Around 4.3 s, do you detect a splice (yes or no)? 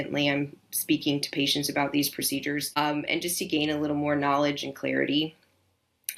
no